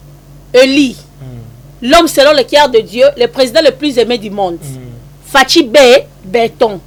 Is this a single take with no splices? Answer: yes; 0 cuts

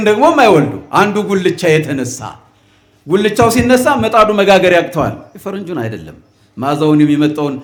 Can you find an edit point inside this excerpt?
no; 0 cuts

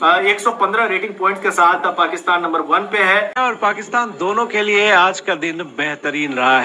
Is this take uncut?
no; 1 cut; at 3.3 s

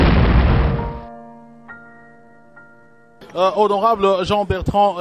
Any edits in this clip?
yes; 1 cut; at 3.0 s

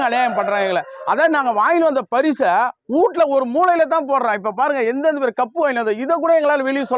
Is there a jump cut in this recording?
no; 0 cuts

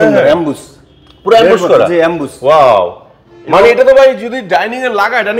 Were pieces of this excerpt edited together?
no; 0 cuts

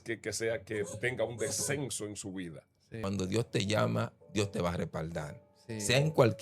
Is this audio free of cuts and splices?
no; 1 cut; at 3.0 s

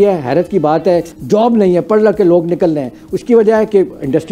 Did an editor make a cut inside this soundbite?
yes; 1 cut; at 1.1 s

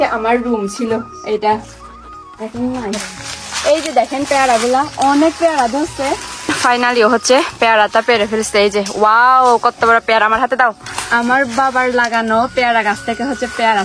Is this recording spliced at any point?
yes; 3 cuts; at 3.2 s, 6.7 s, 10.8 s

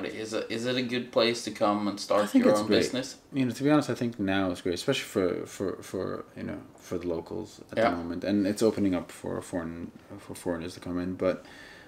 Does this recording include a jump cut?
no; 0 cuts

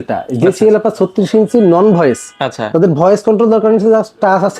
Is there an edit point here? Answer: no; 0 cuts

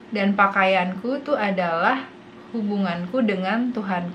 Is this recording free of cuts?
yes; 0 cuts

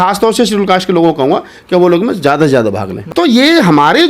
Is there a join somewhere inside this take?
yes; 1 cut; at 3.0 s

